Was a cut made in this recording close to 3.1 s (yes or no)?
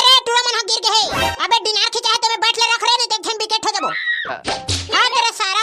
no